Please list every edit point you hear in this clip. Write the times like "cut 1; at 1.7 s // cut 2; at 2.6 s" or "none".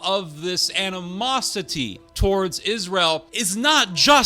cut 1; at 2.0 s // cut 2; at 3.3 s